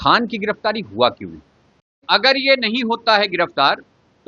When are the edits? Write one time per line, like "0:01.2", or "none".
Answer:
0:02.0